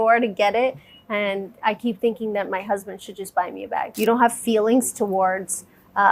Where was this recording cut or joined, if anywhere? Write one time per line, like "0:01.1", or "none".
0:03.9

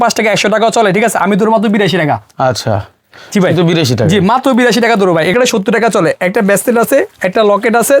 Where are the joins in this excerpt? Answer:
0:05.3

